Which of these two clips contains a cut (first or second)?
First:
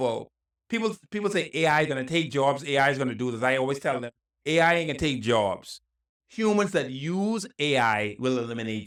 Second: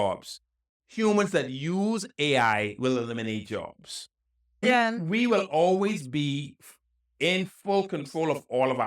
second